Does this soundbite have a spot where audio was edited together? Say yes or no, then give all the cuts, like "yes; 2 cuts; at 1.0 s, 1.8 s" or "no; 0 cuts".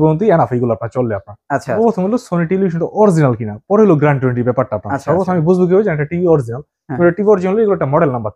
yes; 1 cut; at 1.8 s